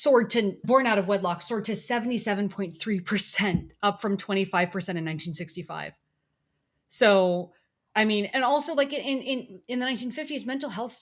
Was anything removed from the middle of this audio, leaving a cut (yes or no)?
no